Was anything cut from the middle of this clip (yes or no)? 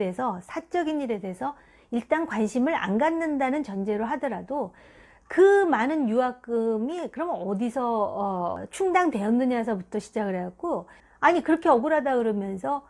yes